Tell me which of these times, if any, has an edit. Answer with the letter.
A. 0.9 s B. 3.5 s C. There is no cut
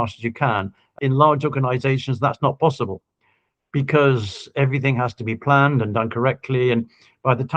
A